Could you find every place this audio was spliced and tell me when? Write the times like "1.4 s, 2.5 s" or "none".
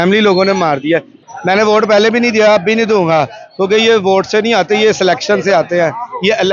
1.2 s